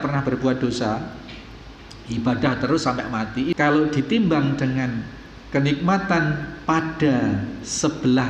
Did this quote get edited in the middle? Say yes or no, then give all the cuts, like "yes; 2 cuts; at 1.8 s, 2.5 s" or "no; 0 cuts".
yes; 1 cut; at 3.6 s